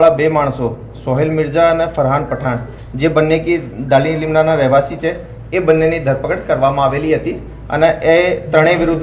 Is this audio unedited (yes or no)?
no